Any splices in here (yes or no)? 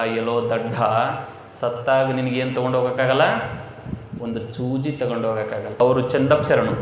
yes